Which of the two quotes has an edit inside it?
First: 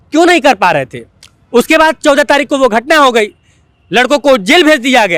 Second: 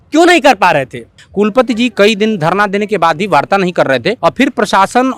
second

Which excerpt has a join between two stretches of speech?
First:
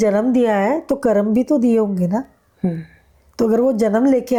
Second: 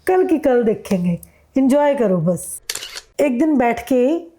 second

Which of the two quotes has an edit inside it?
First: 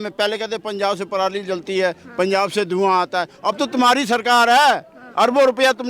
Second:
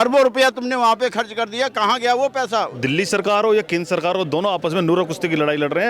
second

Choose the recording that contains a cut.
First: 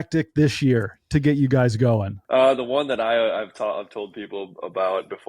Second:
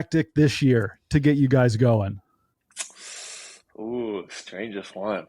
first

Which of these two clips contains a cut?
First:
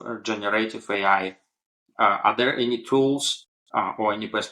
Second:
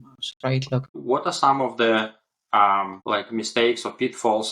second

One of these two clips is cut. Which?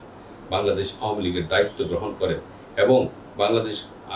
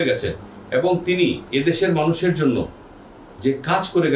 second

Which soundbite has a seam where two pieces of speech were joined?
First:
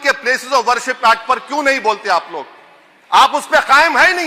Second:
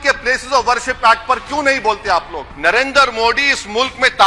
second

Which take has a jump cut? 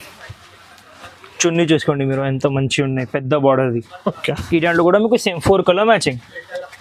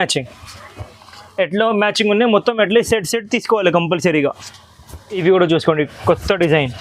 second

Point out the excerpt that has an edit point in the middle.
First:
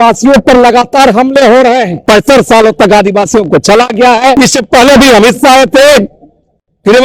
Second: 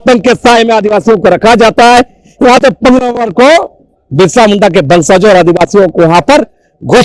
first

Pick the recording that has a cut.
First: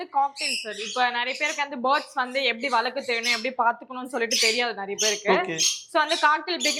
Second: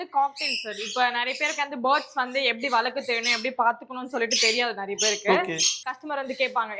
second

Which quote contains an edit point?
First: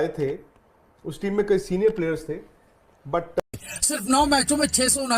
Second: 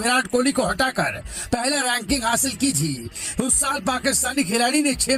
first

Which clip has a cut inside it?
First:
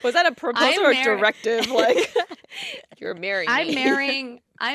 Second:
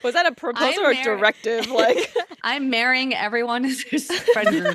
second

